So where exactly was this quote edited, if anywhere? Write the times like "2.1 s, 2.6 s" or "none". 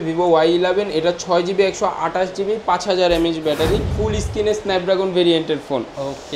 4.0 s